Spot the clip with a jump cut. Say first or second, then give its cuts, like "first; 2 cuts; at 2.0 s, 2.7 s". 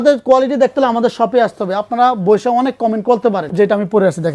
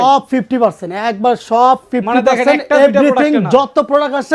first; 1 cut; at 3.5 s